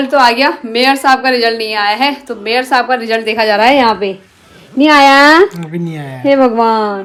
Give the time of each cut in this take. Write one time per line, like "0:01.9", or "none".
none